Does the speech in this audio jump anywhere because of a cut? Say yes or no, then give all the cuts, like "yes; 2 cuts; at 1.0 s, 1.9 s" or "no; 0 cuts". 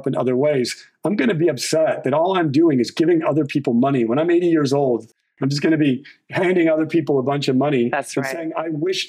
no; 0 cuts